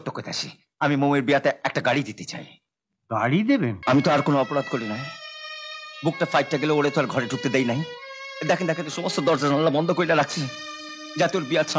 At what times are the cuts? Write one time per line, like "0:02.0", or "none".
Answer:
0:03.8